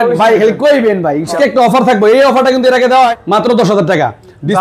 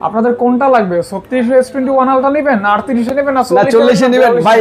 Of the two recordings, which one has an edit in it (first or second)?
first